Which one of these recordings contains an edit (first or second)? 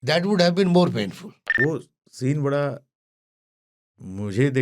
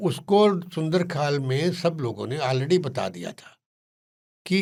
first